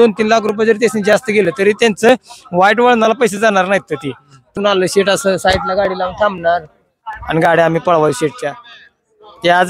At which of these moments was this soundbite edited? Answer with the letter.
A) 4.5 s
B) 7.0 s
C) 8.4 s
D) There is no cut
A